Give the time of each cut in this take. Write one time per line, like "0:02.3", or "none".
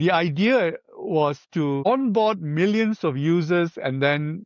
none